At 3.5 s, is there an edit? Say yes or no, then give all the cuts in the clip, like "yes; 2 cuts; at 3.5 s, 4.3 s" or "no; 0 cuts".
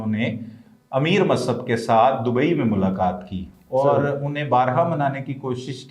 no; 0 cuts